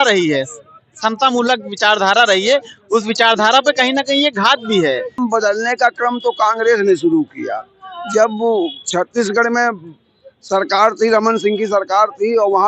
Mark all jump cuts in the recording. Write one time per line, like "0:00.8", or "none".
0:05.2

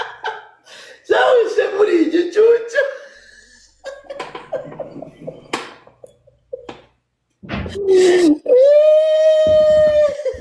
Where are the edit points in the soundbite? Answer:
none

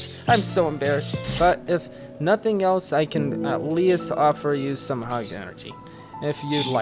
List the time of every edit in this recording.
0:01.2

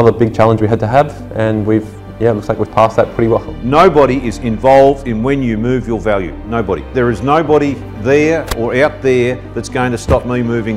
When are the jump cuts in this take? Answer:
0:03.4

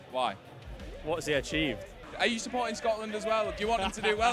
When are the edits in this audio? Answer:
0:00.9
0:02.0

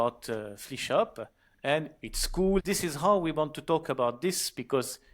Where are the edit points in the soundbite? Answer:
0:02.6

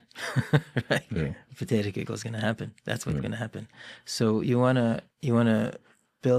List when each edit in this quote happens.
none

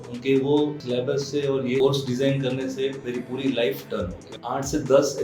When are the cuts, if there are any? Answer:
0:00.8
0:01.8
0:04.3

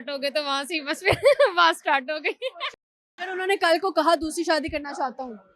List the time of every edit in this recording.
0:02.8

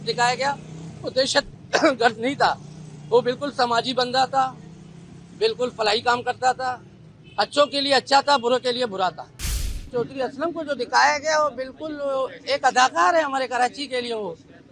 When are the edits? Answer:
0:09.8

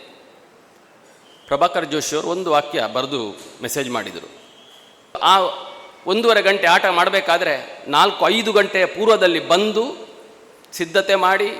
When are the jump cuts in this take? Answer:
0:05.2

